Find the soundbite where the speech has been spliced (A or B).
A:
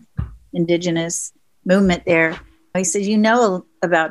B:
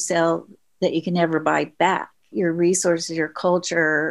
B